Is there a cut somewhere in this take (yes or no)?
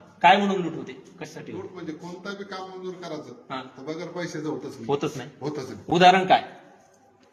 no